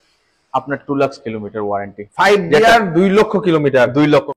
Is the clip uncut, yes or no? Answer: yes